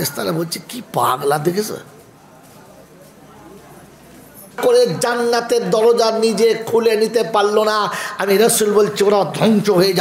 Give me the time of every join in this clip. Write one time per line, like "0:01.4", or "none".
0:04.6